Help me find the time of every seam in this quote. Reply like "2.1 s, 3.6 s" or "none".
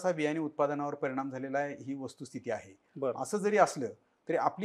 none